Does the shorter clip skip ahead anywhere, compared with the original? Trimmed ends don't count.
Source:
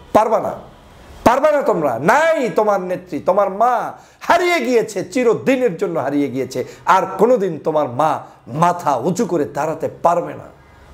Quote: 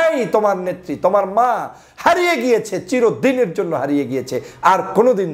no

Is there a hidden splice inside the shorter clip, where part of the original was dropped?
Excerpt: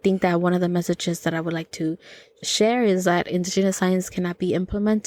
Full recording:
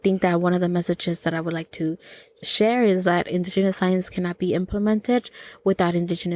no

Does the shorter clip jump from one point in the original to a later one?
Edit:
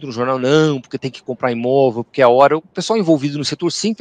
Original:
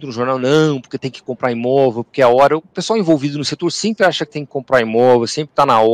no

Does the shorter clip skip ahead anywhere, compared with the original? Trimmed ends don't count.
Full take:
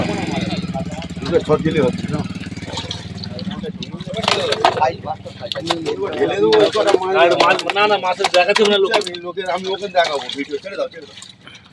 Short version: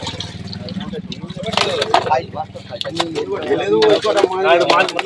no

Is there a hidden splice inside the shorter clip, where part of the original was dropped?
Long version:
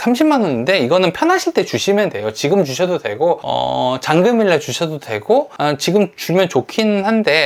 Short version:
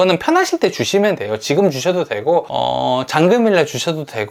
no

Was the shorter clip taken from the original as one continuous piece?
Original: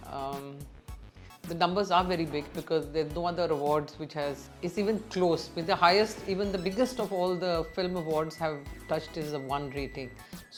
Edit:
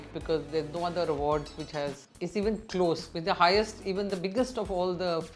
yes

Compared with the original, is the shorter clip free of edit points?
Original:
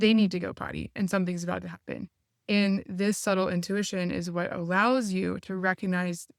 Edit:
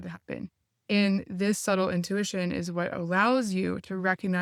yes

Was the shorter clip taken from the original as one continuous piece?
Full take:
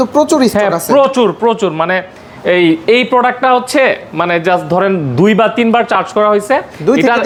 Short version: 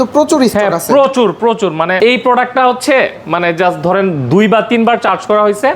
no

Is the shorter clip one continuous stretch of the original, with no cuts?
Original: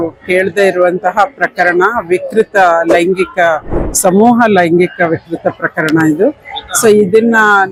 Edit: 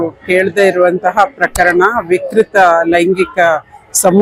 yes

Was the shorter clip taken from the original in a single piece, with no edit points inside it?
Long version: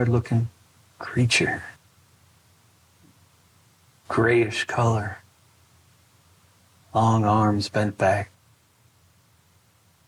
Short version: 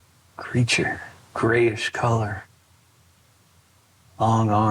no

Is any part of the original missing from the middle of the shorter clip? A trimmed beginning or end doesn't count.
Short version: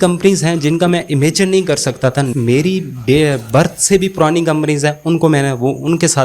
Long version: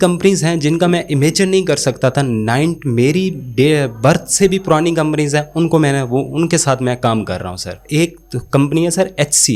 yes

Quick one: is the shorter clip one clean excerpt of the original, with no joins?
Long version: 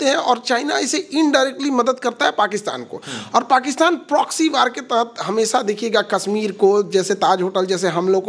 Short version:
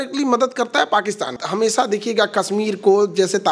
no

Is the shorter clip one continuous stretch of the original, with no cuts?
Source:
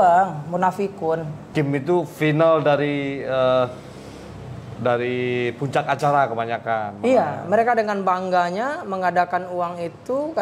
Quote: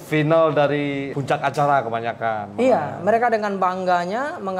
no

